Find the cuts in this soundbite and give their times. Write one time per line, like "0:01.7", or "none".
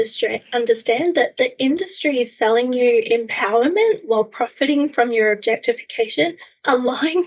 none